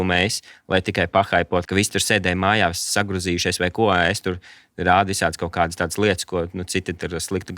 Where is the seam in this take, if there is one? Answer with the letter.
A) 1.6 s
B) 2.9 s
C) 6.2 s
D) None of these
A